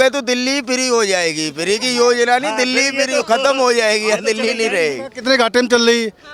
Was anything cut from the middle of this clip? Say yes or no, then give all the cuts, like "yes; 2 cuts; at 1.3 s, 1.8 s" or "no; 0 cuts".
no; 0 cuts